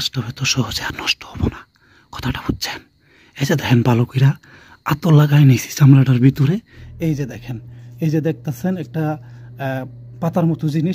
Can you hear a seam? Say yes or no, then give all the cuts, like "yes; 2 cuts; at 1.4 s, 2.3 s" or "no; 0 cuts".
yes; 1 cut; at 6.8 s